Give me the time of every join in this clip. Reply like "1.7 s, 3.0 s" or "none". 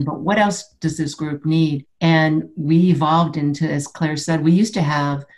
1.9 s